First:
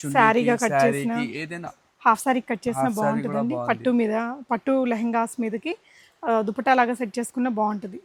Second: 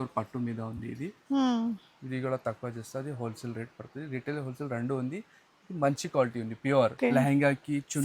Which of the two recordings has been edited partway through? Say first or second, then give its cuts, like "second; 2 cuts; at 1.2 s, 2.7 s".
second; 1 cut; at 7.0 s